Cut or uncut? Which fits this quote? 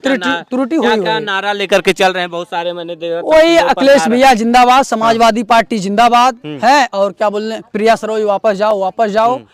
uncut